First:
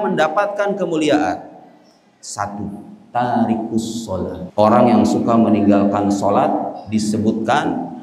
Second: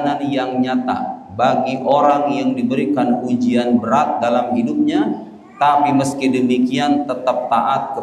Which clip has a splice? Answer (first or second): first